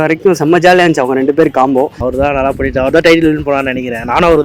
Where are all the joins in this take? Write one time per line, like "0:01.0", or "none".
0:02.0